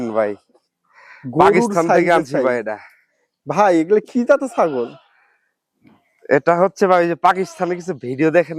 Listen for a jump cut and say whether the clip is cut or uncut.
uncut